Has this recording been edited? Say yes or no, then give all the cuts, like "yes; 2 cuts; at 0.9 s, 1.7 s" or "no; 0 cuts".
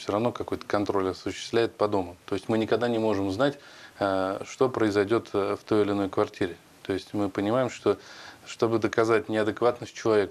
no; 0 cuts